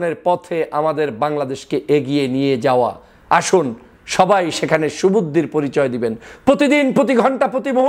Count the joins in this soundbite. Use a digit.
0